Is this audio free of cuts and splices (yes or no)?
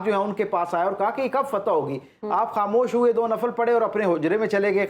yes